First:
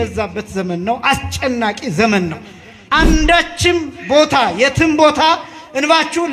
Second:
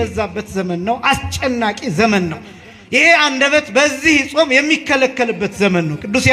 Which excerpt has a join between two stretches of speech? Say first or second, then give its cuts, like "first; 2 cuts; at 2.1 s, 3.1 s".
first; 1 cut; at 2.8 s